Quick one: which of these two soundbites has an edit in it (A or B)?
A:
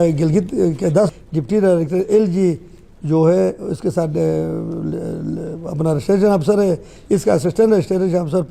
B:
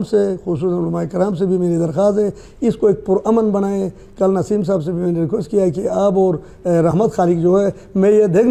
A